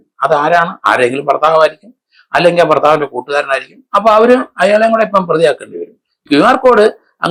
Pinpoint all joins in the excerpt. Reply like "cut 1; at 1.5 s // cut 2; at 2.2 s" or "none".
none